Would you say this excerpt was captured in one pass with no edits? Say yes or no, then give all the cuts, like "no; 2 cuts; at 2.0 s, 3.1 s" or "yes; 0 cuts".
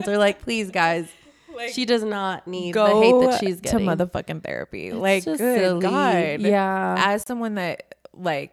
yes; 0 cuts